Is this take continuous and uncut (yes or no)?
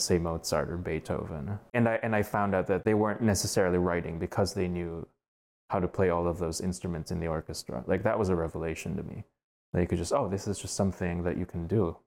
no